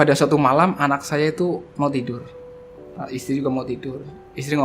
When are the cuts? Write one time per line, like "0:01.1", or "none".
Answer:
0:01.7